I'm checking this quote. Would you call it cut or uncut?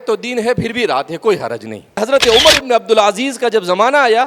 cut